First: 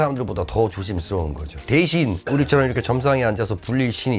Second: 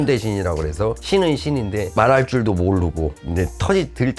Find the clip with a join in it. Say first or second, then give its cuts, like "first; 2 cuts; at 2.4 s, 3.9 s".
first; 1 cut; at 1.5 s